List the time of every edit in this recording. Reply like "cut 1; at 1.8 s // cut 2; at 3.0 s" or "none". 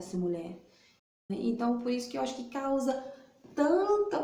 cut 1; at 1.3 s